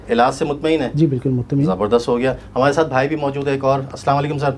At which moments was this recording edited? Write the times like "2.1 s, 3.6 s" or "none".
none

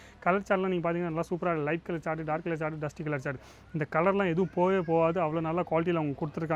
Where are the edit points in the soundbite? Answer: none

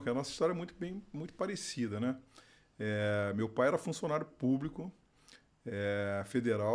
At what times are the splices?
none

